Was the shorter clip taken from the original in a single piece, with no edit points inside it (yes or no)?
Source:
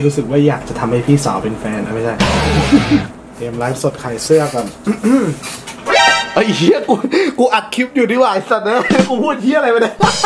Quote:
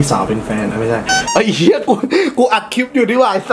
no